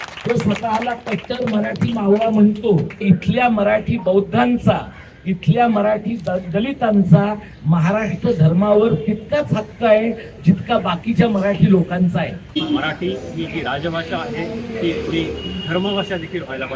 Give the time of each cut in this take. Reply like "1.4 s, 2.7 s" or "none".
3.0 s, 12.6 s